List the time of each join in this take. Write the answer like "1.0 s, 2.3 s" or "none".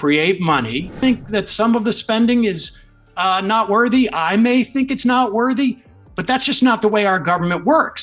1.0 s

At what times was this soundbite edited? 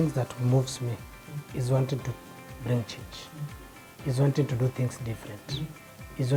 none

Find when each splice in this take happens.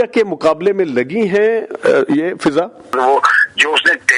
2.9 s

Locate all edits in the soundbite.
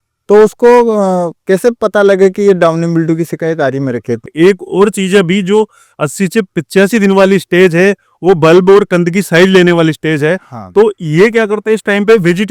4.3 s

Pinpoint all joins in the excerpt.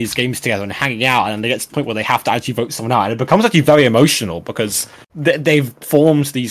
none

